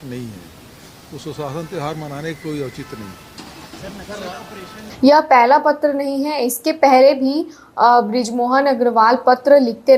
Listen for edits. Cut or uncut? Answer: uncut